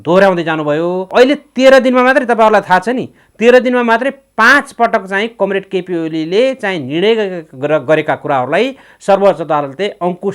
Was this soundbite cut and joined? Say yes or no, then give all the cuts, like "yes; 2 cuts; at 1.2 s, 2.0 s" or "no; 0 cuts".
yes; 1 cut; at 1.0 s